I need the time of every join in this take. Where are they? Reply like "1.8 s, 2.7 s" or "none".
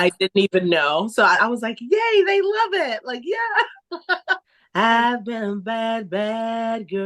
4.5 s